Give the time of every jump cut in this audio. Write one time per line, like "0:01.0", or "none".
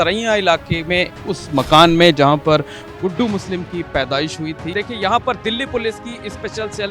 0:04.7